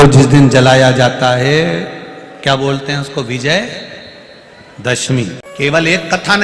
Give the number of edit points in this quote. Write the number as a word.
one